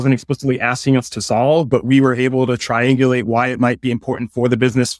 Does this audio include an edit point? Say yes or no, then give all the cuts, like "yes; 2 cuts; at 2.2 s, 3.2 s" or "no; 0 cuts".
no; 0 cuts